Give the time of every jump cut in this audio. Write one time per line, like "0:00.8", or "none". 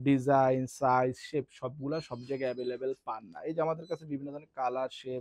none